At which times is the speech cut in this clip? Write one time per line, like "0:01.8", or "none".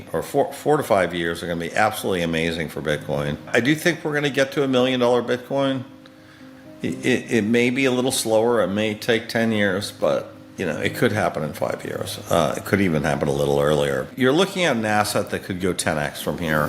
0:03.5
0:14.1